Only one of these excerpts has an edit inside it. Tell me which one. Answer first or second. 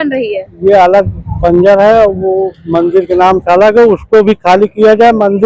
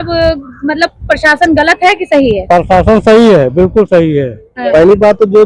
second